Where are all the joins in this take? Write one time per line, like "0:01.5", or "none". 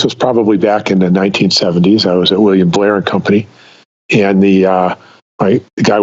none

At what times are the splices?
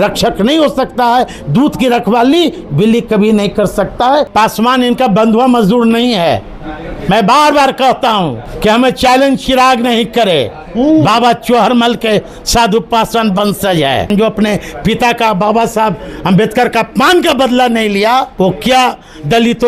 0:04.3
0:08.4
0:14.1
0:18.3

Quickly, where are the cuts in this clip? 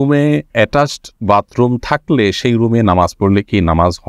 none

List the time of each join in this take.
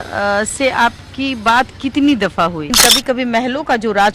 0:02.7

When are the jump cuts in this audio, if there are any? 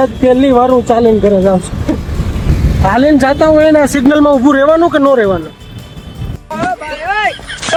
none

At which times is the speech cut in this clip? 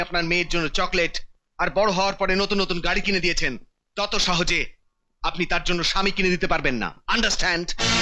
none

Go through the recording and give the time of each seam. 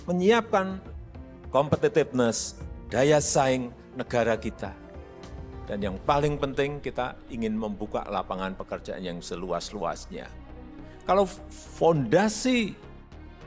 none

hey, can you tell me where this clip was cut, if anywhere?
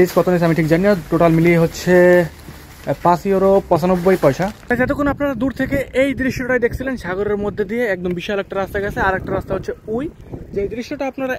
0:04.7

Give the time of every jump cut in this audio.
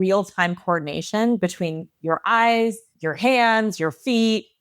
0:02.9

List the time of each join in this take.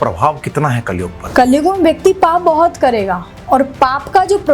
0:01.2

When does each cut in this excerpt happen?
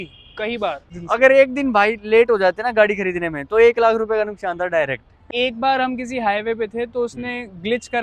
0:00.9
0:05.2

